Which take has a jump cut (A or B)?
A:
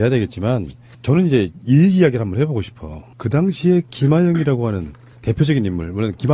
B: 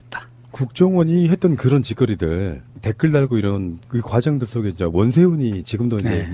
B